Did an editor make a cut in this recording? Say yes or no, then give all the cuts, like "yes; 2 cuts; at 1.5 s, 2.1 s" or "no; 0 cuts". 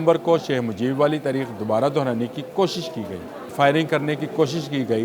yes; 1 cut; at 3.5 s